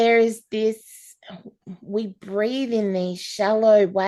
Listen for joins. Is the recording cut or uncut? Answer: uncut